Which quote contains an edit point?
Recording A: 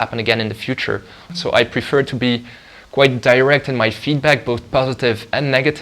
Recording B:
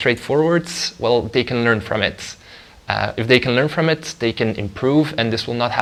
A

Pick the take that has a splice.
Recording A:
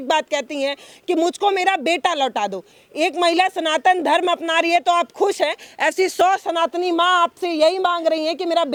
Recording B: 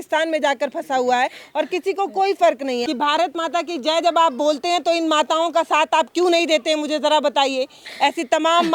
B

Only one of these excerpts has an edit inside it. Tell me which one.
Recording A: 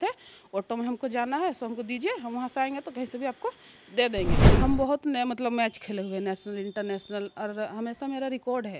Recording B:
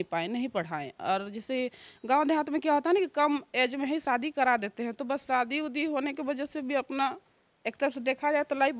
A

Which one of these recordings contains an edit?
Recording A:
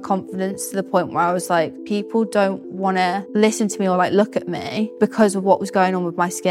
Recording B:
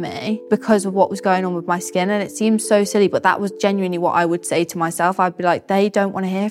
A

